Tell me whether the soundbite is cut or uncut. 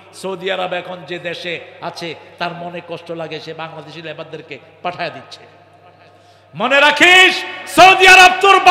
uncut